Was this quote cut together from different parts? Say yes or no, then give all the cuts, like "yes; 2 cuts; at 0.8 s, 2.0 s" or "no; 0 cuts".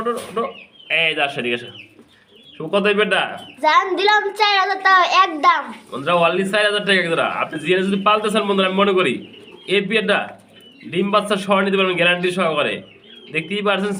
no; 0 cuts